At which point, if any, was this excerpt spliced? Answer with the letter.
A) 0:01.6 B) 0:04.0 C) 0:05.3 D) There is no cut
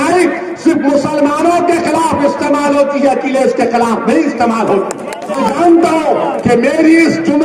C